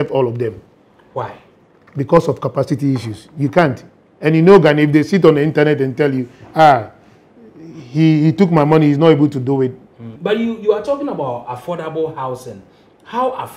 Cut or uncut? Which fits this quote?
cut